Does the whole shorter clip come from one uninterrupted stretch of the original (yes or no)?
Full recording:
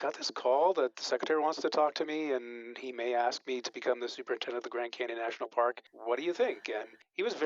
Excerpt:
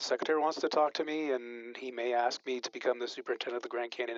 yes